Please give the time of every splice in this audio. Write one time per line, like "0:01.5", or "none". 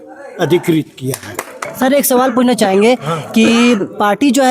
0:01.6